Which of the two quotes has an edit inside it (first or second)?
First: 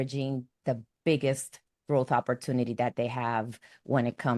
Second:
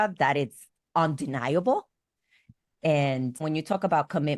second